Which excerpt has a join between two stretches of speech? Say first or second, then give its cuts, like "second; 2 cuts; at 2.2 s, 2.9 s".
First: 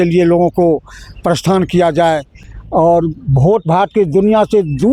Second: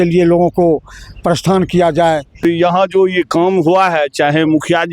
second; 1 cut; at 2.4 s